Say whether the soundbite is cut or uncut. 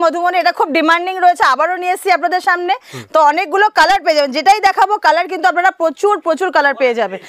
uncut